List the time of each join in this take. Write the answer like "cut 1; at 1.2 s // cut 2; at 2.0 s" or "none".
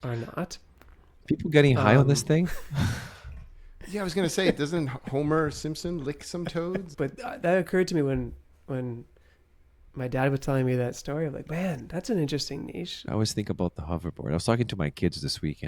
cut 1; at 6.9 s // cut 2; at 13.0 s